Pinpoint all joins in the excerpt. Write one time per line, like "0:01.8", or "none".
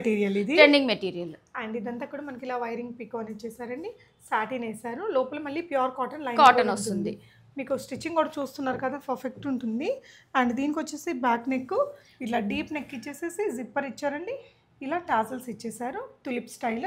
none